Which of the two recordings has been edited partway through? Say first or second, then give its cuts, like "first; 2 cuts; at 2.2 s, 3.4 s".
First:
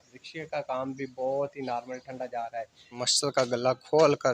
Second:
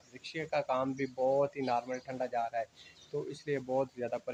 first; 1 cut; at 3.0 s